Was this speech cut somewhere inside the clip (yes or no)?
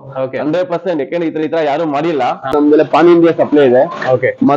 yes